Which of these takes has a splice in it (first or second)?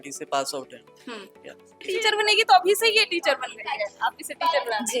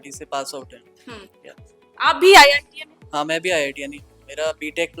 first